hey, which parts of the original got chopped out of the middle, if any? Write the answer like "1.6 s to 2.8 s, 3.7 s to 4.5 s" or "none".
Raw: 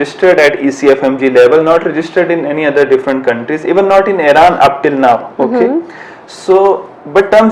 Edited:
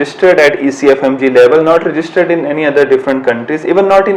none